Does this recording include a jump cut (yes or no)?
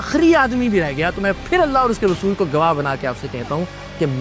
no